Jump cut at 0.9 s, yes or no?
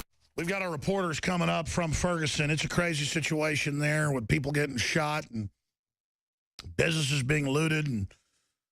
yes